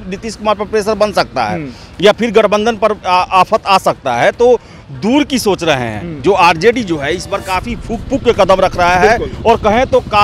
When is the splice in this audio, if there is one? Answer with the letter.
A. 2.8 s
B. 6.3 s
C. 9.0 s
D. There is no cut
D